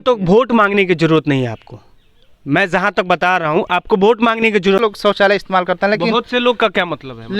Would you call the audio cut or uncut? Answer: cut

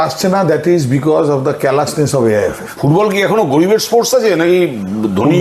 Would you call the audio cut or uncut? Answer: cut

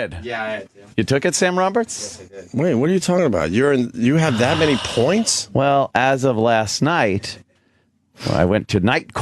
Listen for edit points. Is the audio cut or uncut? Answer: uncut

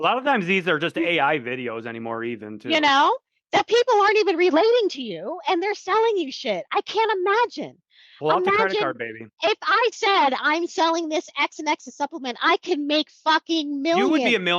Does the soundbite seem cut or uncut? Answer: uncut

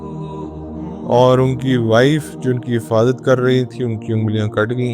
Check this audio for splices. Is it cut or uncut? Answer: cut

